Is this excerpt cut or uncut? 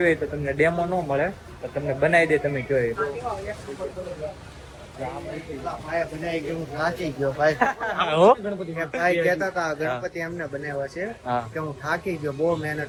uncut